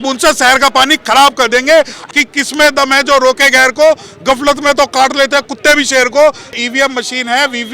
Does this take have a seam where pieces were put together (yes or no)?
yes